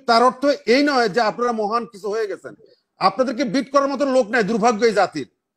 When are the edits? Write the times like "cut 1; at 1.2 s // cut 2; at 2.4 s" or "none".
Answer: none